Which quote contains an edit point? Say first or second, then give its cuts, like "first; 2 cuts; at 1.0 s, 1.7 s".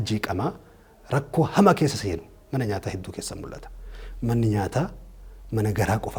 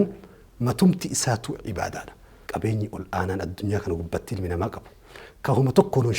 second; 1 cut; at 2.3 s